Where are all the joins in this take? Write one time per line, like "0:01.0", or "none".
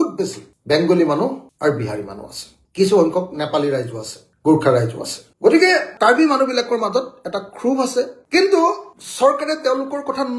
0:08.2